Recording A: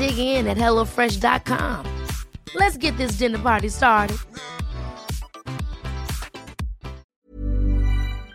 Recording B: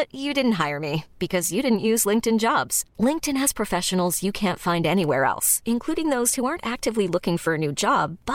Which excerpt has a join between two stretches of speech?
A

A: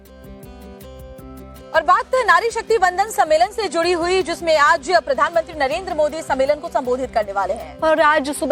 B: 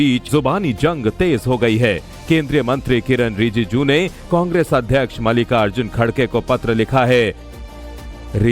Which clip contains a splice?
B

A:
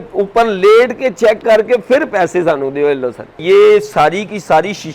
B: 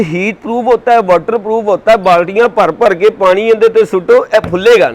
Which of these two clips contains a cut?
A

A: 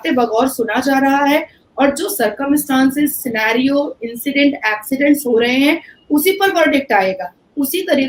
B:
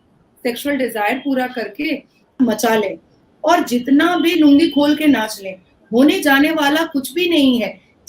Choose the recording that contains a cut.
B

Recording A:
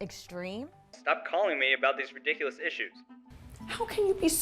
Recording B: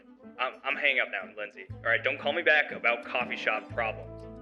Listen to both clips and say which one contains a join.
A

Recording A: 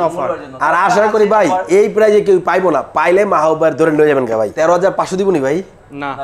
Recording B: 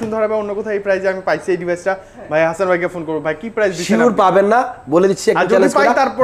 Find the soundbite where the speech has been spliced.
A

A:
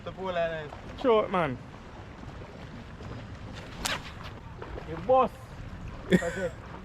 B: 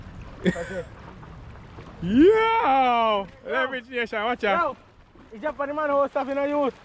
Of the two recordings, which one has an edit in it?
A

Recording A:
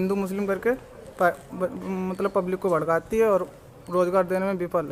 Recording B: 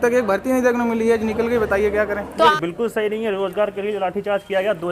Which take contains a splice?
B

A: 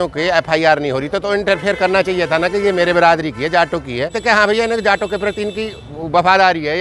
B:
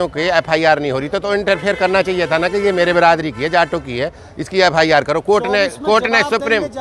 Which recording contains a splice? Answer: A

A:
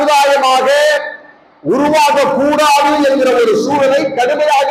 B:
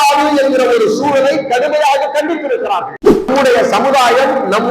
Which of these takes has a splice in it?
B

